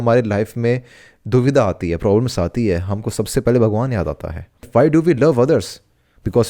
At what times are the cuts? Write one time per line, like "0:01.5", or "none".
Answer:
0:04.7